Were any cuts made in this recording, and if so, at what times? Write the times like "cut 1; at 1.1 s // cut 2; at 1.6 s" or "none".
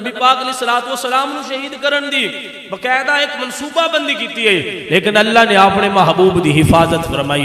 none